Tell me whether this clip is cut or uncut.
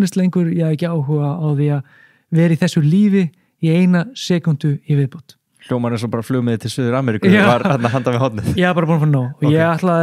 uncut